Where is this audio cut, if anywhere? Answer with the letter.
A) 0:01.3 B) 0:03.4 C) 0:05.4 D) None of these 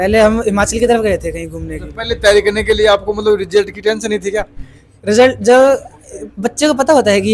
D